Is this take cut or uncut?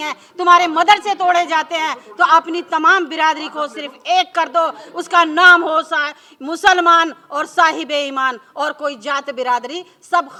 uncut